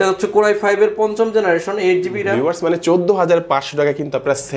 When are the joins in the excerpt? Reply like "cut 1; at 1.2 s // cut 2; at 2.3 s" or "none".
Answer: cut 1; at 2.3 s